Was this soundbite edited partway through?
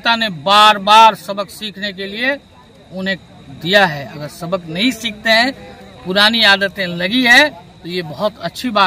no; 0 cuts

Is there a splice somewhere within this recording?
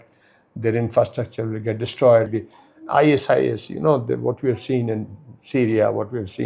yes; 1 cut; at 2.4 s

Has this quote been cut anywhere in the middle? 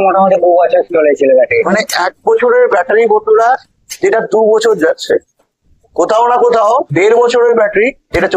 no; 0 cuts

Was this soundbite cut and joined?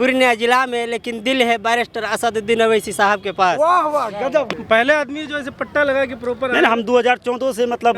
yes; 1 cut; at 4.5 s

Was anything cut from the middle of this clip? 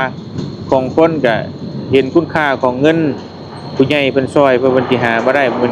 no; 0 cuts

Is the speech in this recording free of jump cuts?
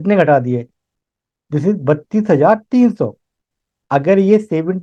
yes; 0 cuts

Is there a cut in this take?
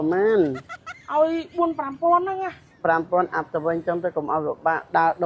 yes; 1 cut; at 2.7 s

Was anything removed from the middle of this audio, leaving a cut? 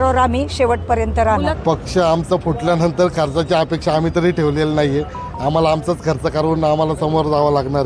yes; 1 cut; at 1.6 s

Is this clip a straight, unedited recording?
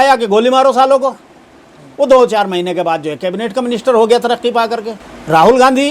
yes; 0 cuts

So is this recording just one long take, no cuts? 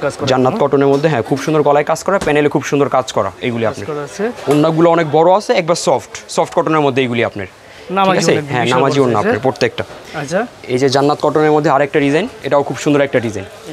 yes; 0 cuts

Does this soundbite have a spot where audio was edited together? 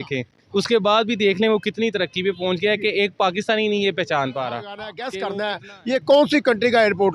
yes; 1 cut; at 5.1 s

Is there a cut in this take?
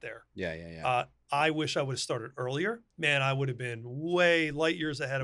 yes; 1 cut; at 2.9 s

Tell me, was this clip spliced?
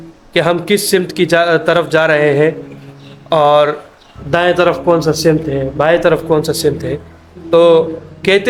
no; 0 cuts

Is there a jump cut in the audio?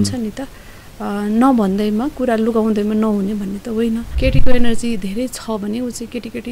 yes; 1 cut; at 4.1 s

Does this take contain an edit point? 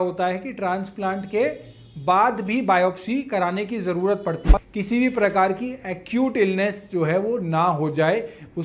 yes; 1 cut; at 4.5 s

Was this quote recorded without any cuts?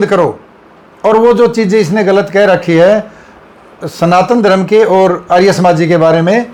yes; 0 cuts

